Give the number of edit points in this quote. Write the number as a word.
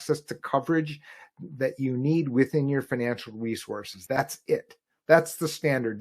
one